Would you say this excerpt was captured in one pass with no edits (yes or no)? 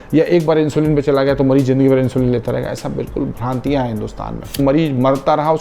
no